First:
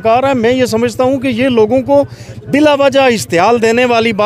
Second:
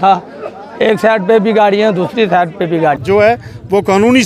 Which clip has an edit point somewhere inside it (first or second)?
second